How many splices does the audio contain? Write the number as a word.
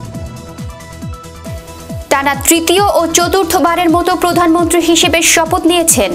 one